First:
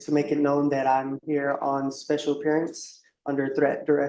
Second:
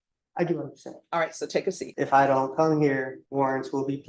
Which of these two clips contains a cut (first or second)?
second